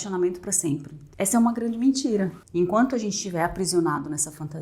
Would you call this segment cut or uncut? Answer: cut